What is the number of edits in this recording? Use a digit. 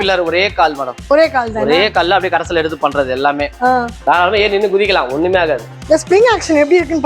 1